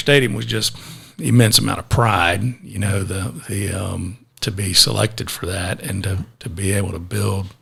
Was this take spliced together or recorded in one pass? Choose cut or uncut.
uncut